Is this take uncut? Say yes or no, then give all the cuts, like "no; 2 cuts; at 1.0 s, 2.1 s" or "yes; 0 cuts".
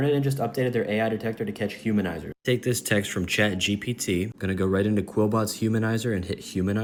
yes; 0 cuts